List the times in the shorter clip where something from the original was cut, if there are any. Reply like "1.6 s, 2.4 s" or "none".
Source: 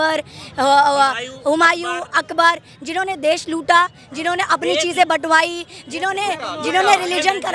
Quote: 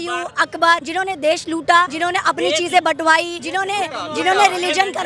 0.9 s, 1.9 s, 3.4 s